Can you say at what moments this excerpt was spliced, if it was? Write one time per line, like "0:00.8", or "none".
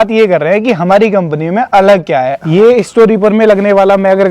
0:02.4

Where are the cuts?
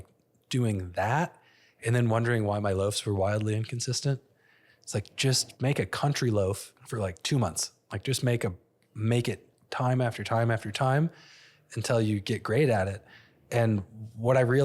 0:05.5
0:06.7

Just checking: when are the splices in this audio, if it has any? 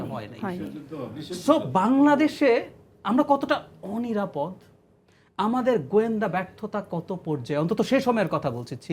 none

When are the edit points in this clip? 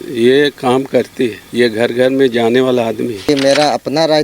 0:01.4
0:03.2

